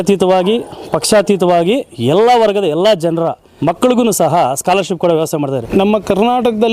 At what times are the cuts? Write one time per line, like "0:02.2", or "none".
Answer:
0:03.5
0:05.6